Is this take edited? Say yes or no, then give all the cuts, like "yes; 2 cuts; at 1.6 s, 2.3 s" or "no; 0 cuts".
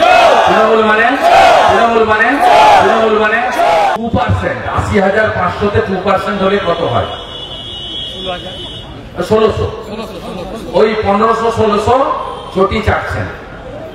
yes; 1 cut; at 3.9 s